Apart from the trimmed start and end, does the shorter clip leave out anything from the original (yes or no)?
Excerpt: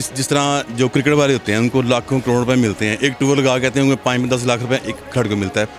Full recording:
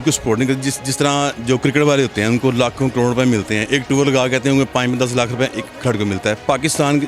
no